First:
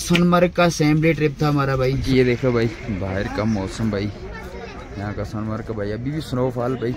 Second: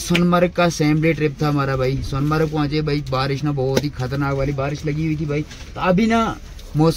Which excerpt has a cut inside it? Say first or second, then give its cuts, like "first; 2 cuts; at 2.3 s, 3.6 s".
first; 1 cut; at 2.0 s